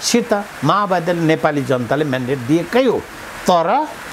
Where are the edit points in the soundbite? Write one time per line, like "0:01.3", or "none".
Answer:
none